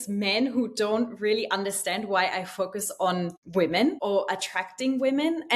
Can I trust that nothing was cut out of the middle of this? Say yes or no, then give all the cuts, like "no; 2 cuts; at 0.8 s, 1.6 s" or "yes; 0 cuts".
no; 2 cuts; at 3.4 s, 4.0 s